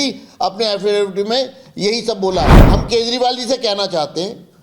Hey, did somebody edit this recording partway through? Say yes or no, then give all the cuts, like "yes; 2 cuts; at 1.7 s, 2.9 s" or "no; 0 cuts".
yes; 1 cut; at 2.6 s